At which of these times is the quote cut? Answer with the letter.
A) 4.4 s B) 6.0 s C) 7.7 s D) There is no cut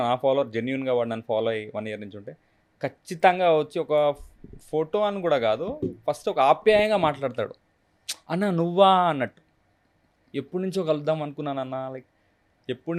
D